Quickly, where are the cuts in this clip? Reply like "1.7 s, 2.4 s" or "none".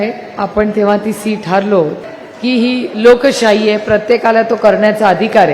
2.0 s